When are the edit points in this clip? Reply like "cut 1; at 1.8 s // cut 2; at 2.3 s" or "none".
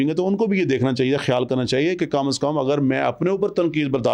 none

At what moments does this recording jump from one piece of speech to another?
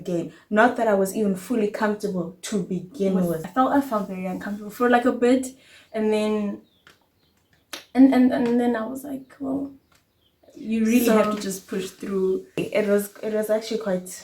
cut 1; at 3.5 s // cut 2; at 12.6 s

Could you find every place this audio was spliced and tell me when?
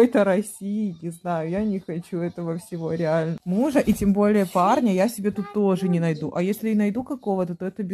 cut 1; at 3.4 s

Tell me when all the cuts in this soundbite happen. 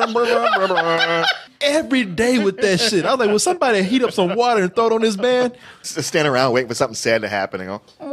cut 1; at 1.5 s // cut 2; at 5.9 s

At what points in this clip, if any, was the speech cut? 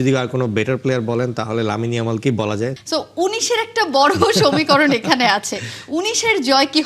cut 1; at 2.8 s

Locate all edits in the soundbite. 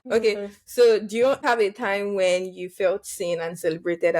cut 1; at 1.4 s

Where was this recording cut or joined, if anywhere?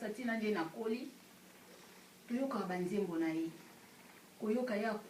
none

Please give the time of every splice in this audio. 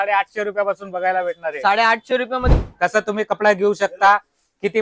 cut 1; at 2.5 s

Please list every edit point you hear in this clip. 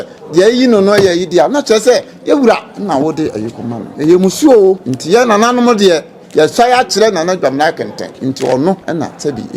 cut 1; at 3.9 s // cut 2; at 4.9 s // cut 3; at 8.0 s // cut 4; at 8.8 s

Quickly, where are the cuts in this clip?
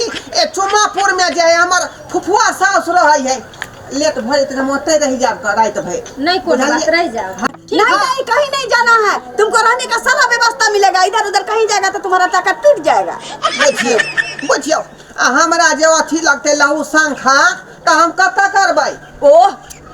cut 1; at 7.4 s

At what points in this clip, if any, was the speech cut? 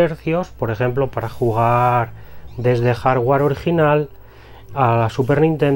none

